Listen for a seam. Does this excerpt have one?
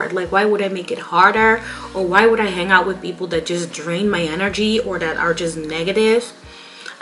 no; 0 cuts

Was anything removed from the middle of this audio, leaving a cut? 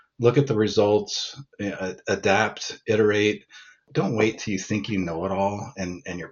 yes; 1 cut; at 3.9 s

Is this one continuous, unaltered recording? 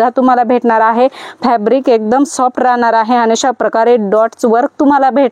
yes; 0 cuts

